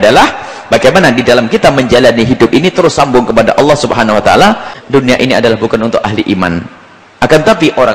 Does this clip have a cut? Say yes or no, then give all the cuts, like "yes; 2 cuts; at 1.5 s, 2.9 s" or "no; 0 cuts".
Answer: yes; 1 cut; at 4.7 s